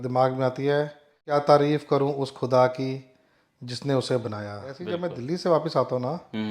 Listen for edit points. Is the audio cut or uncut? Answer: cut